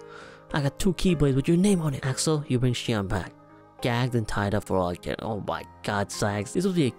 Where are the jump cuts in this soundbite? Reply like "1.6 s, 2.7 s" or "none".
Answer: 2.1 s